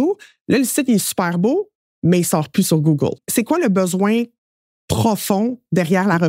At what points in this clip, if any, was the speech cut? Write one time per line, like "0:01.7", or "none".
0:03.2

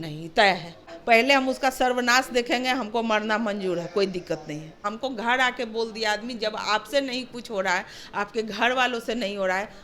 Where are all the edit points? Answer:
0:00.9
0:04.9

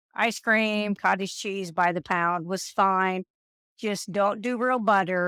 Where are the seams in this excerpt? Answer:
none

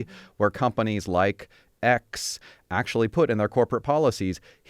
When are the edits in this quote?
0:02.5

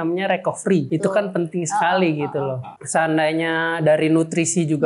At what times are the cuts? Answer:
0:00.9
0:02.7

